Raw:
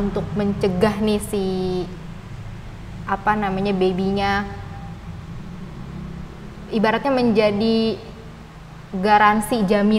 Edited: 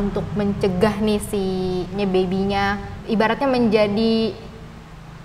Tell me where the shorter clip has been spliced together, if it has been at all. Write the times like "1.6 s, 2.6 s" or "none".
1.9 s, 2.9 s